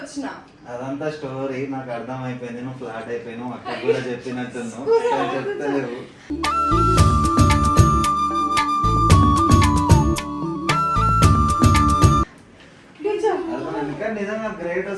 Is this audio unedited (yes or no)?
yes